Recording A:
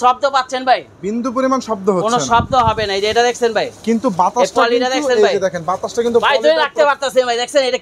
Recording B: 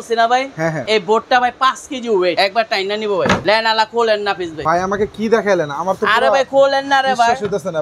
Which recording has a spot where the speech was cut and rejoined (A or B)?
B